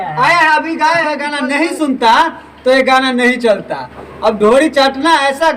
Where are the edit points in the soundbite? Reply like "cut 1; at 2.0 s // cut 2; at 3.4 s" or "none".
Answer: cut 1; at 1.2 s

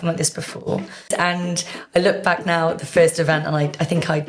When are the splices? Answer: cut 1; at 1.1 s

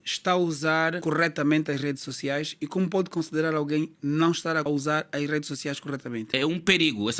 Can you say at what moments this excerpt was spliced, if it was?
cut 1; at 1.0 s // cut 2; at 4.6 s // cut 3; at 6.3 s

